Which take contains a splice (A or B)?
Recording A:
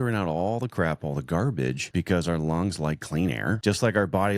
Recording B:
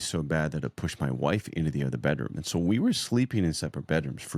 A